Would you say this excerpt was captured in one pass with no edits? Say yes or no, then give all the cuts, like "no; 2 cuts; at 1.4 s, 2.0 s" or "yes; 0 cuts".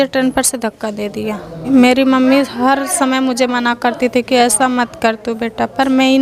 no; 1 cut; at 1.7 s